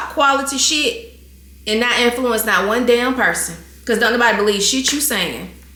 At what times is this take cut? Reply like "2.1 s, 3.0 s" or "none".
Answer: none